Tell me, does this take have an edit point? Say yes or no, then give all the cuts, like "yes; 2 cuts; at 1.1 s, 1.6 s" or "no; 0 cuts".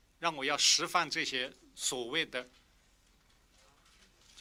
no; 0 cuts